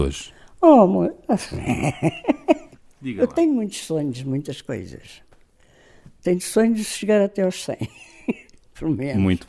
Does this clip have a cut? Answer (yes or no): yes